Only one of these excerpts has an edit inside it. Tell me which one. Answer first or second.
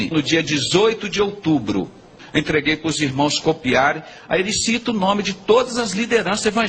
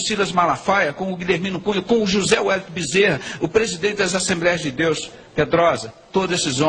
first